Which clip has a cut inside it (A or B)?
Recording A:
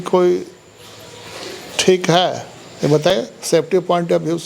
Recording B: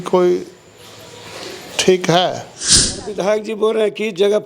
B